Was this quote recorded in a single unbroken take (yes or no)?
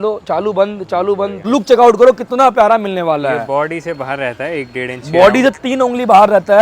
no